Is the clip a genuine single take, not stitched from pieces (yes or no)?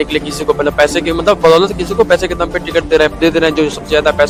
yes